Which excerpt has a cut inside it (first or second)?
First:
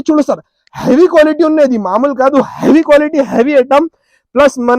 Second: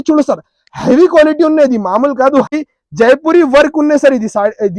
second